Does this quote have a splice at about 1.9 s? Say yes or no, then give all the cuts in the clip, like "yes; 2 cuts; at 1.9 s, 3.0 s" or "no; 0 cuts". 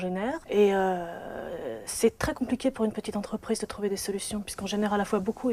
yes; 1 cut; at 1.9 s